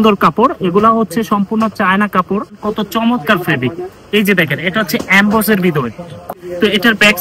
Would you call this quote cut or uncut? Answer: cut